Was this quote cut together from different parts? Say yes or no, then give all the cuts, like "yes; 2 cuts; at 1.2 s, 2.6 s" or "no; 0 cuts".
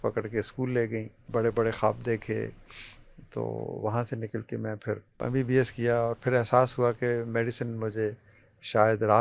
yes; 2 cuts; at 1.2 s, 5.2 s